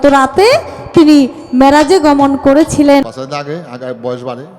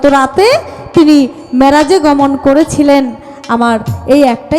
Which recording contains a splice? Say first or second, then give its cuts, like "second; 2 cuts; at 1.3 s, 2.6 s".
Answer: first; 1 cut; at 3.2 s